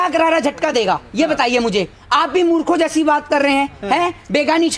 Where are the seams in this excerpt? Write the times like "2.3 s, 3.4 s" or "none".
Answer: none

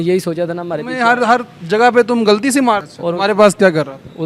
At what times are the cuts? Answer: 2.9 s

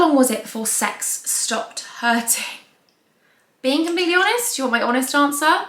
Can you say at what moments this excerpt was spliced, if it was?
none

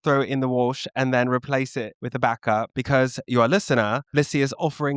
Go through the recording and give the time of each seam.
2.0 s, 2.7 s

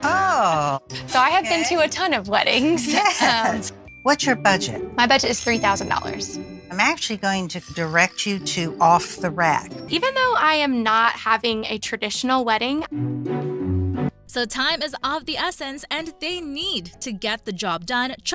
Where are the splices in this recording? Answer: none

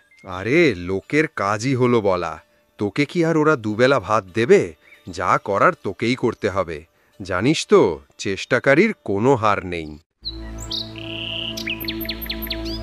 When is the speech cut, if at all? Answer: 10.1 s

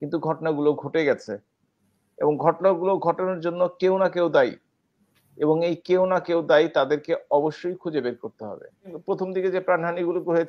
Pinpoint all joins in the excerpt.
8.9 s

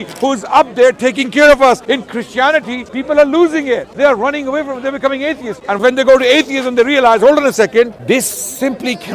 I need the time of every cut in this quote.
1.8 s, 2.9 s, 3.9 s, 5.8 s, 8.0 s

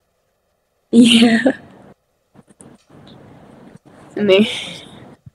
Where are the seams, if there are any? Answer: 2.0 s

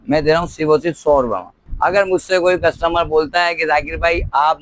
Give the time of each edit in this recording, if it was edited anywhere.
1.7 s

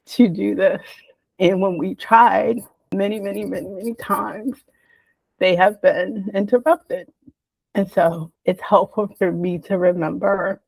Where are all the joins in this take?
none

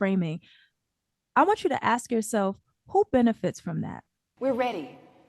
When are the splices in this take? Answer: 4.3 s

